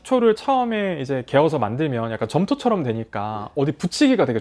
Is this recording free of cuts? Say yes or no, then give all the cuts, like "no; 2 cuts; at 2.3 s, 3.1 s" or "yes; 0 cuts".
yes; 0 cuts